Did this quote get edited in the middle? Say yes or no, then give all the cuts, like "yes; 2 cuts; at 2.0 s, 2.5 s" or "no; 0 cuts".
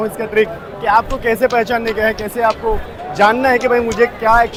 no; 0 cuts